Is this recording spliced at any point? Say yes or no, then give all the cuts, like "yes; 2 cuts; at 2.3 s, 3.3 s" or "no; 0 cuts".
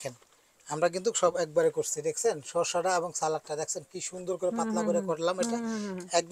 no; 0 cuts